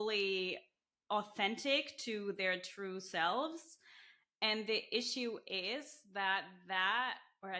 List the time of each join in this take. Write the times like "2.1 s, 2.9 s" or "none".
none